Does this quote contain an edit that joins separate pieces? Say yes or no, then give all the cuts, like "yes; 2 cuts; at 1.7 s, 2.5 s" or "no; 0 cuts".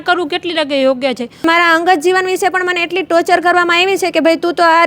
yes; 1 cut; at 1.4 s